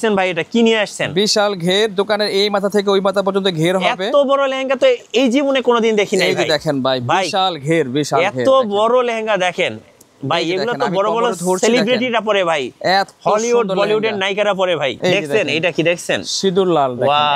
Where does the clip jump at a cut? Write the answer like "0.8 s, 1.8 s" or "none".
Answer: 15.0 s